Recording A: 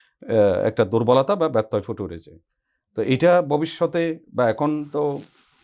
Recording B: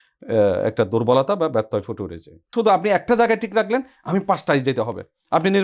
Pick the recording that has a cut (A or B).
B